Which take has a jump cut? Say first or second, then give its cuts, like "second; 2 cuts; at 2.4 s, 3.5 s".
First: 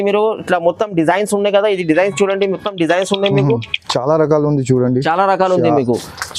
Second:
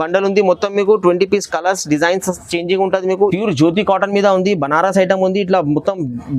second; 1 cut; at 3.3 s